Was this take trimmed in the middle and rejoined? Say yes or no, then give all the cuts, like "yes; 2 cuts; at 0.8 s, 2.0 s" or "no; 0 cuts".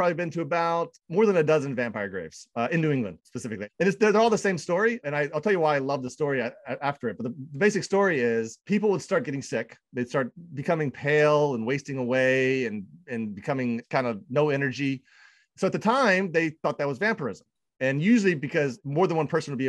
no; 0 cuts